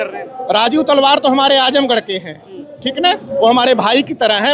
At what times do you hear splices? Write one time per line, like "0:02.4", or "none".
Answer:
none

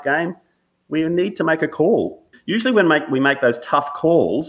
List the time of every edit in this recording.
0:02.3

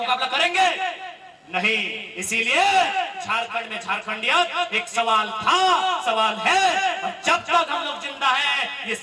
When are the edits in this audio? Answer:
none

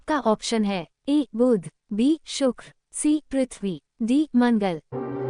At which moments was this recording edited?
none

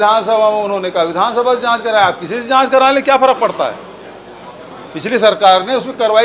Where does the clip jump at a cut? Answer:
none

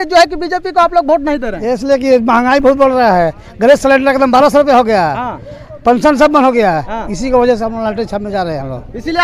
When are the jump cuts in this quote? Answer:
none

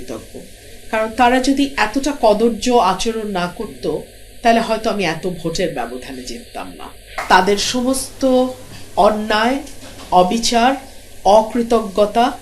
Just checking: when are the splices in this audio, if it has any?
0:07.1

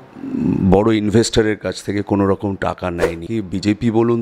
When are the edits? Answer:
0:03.2

